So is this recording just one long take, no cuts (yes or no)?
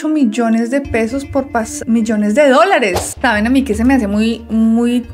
no